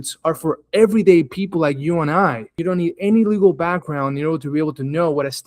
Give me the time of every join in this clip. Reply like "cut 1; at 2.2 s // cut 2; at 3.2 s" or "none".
cut 1; at 2.5 s